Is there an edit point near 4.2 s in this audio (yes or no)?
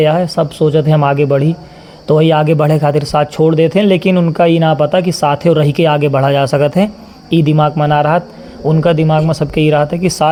no